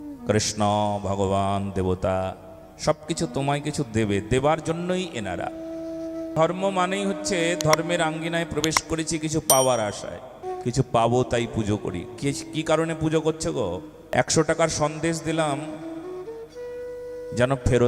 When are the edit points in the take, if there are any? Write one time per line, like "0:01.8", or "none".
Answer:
0:06.3
0:10.5
0:13.9